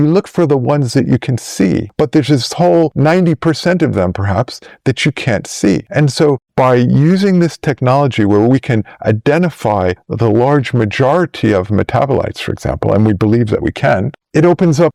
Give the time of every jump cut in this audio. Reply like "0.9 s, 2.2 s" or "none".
none